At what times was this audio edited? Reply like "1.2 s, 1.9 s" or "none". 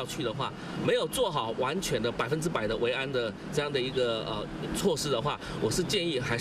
none